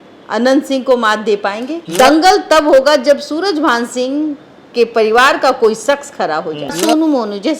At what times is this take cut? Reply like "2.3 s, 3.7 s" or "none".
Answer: 1.7 s, 6.8 s